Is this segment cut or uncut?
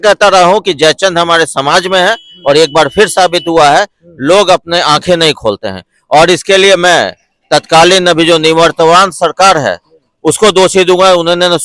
uncut